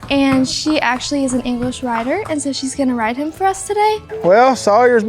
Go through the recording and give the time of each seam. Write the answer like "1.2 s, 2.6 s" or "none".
4.1 s